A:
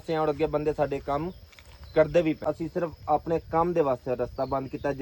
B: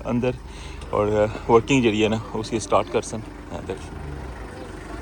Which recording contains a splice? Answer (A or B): A